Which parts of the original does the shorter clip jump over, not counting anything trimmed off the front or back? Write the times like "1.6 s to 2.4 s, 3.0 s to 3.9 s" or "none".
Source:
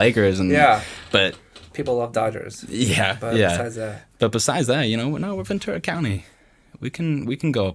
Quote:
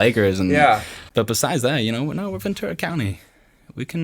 1.0 s to 4.0 s